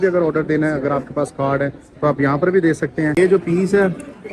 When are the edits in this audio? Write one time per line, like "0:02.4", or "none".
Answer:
0:03.2

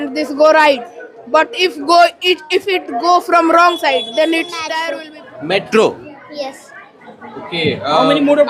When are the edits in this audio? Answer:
0:04.7

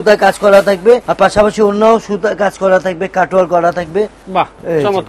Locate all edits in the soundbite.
0:01.1
0:04.2

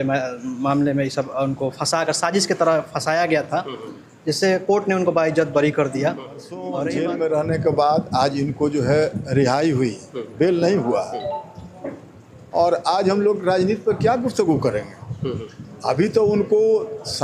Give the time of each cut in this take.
0:06.7

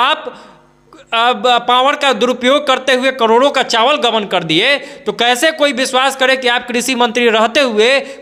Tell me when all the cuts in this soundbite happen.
none

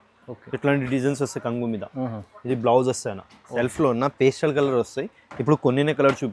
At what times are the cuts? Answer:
0:03.4

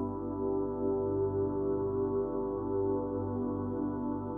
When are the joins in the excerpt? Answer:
none

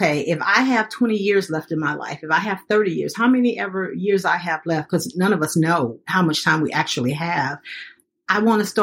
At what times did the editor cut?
0:06.1

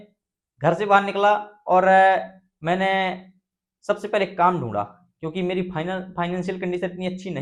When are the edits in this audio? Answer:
none

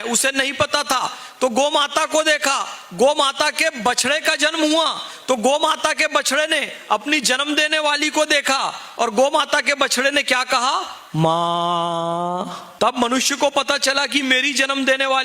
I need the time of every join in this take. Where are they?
none

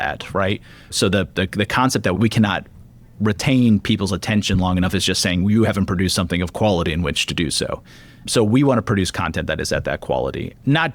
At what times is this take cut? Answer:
0:02.2

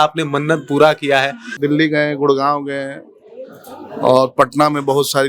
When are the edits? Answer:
0:01.5

